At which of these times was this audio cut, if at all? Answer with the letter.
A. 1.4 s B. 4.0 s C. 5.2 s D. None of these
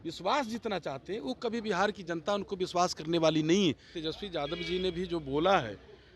B